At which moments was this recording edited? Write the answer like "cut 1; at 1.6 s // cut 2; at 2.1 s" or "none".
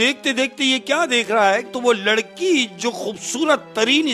cut 1; at 1.7 s